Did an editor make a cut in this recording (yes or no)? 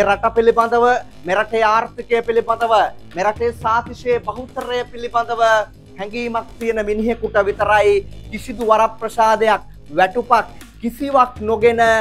no